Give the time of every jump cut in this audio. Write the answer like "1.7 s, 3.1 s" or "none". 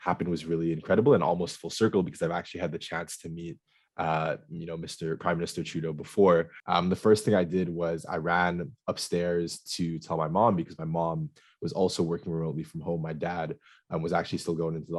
6.6 s